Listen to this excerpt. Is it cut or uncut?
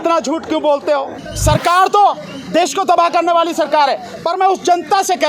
cut